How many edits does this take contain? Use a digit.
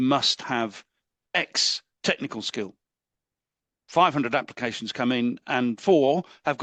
0